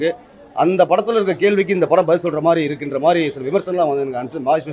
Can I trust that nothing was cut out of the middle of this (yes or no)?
yes